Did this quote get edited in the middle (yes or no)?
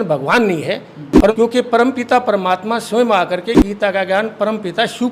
yes